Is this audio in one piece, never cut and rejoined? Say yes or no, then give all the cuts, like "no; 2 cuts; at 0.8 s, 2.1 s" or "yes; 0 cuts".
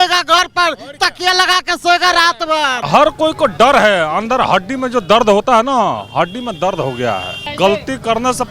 no; 2 cuts; at 2.8 s, 7.4 s